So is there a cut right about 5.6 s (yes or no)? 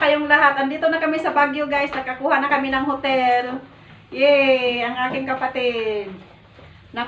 no